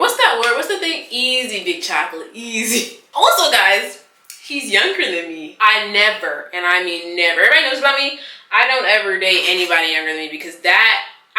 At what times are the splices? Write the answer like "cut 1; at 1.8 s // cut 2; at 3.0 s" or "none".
none